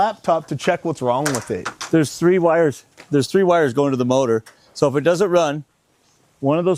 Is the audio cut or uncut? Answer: uncut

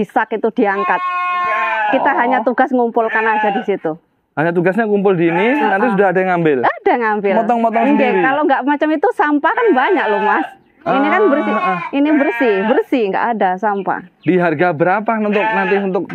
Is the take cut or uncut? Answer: uncut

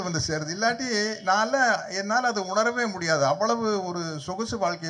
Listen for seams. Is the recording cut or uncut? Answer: uncut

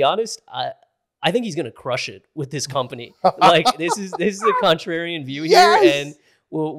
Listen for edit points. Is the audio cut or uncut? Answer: uncut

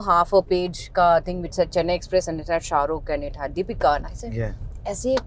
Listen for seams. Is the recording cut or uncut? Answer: uncut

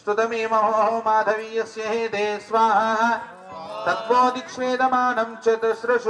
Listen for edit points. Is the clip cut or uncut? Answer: uncut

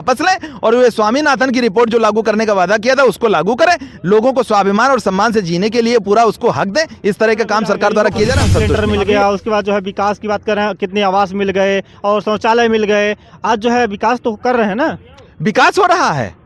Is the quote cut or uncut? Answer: cut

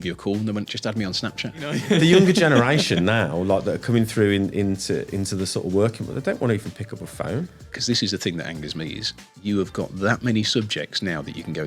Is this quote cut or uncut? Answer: cut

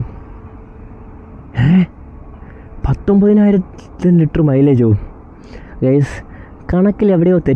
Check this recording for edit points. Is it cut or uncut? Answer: uncut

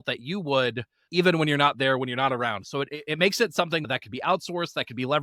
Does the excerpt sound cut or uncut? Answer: uncut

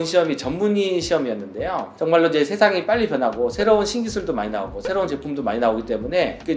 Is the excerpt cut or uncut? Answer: cut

